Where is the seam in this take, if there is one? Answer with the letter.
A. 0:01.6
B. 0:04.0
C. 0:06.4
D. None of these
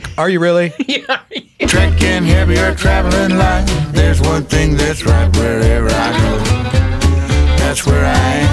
A